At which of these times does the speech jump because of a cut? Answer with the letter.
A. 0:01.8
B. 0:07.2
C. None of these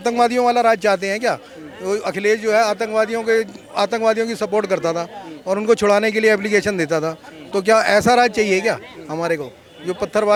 C